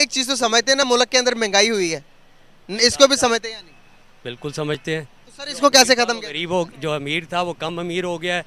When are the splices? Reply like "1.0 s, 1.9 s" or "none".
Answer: none